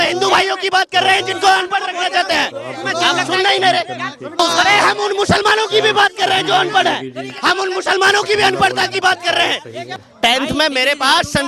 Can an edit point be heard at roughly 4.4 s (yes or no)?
yes